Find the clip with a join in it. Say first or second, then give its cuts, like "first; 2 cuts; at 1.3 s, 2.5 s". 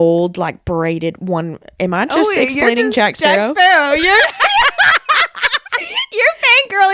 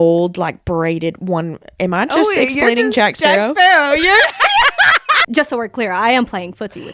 second; 1 cut; at 5.2 s